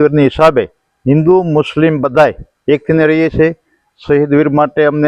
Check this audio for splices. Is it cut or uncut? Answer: uncut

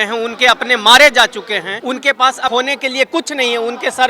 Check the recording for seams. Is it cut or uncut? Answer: cut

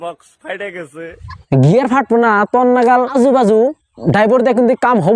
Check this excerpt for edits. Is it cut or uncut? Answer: cut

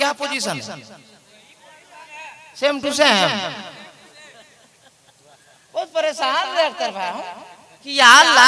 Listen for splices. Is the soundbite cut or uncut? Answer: uncut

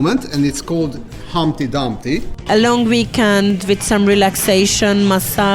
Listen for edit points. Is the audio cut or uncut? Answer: cut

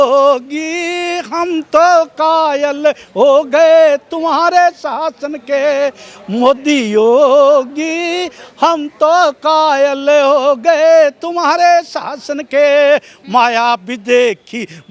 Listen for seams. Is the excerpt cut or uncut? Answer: uncut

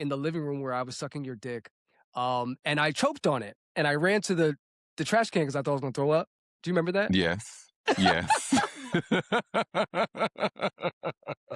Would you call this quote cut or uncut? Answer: uncut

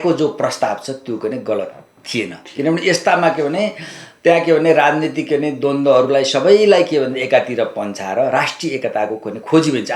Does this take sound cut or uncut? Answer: uncut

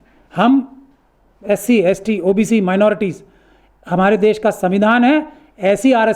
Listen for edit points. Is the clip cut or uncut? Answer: uncut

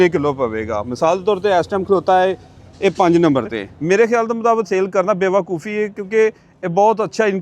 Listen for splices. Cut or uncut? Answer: cut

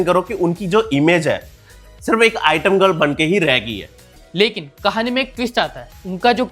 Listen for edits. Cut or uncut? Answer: cut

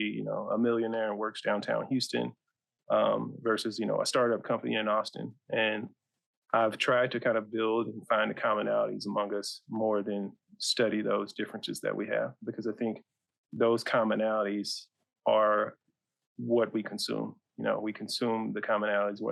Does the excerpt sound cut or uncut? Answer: uncut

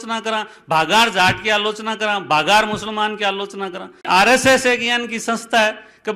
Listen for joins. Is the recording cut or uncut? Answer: cut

